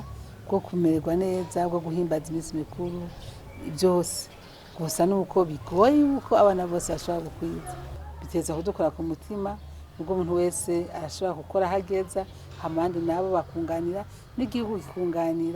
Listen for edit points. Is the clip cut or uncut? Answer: cut